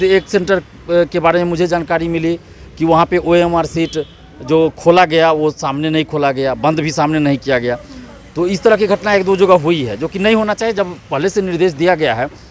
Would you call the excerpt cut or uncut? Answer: uncut